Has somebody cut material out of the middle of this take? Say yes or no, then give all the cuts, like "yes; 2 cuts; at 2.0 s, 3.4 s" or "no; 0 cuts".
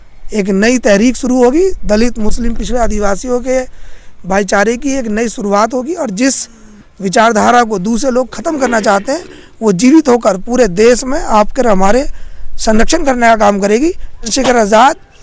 yes; 1 cut; at 14.3 s